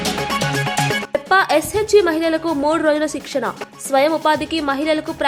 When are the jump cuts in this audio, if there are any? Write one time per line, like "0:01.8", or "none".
none